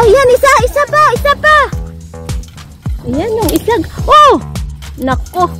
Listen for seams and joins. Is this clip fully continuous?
yes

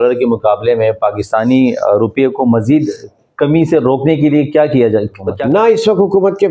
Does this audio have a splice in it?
yes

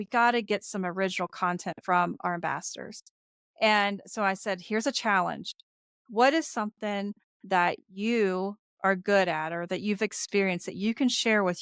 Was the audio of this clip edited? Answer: no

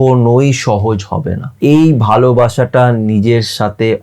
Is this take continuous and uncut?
no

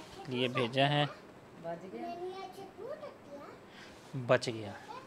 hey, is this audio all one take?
yes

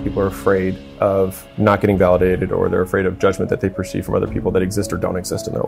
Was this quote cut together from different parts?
yes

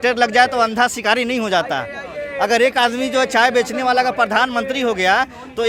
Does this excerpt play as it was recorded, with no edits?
yes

